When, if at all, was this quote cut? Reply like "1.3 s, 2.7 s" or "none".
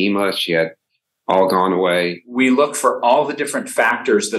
0.9 s, 2.3 s

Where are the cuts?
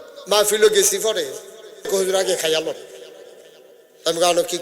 1.9 s

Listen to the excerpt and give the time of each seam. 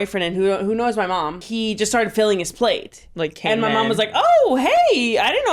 1.4 s

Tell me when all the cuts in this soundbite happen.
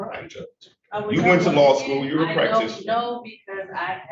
none

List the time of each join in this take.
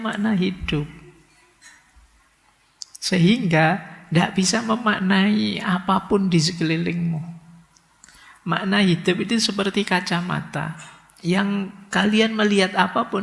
none

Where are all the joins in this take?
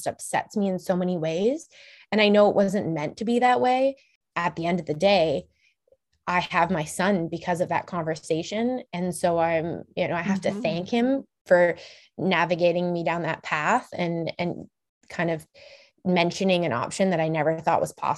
4.2 s

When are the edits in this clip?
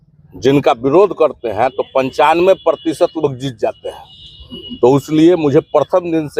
none

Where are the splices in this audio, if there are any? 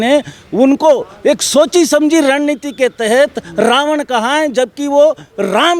none

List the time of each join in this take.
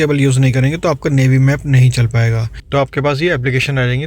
2.5 s

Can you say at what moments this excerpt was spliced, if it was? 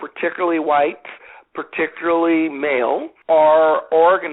3.1 s

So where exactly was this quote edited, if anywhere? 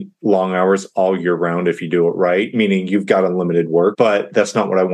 2.5 s, 3.9 s

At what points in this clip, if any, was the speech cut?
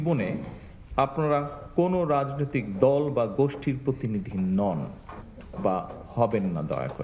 none

